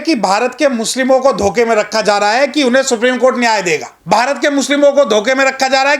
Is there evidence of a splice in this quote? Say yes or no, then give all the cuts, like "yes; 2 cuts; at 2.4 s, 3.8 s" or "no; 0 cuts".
yes; 1 cut; at 3.9 s